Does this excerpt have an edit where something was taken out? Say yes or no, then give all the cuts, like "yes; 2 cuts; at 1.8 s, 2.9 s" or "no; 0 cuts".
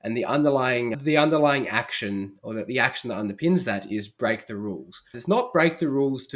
yes; 2 cuts; at 1.0 s, 5.1 s